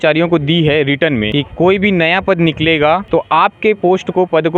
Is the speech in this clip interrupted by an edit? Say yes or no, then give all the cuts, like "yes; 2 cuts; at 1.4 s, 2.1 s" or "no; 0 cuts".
yes; 2 cuts; at 1.3 s, 3.0 s